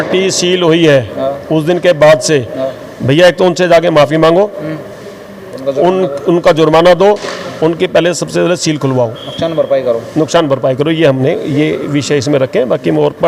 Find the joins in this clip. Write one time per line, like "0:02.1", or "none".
none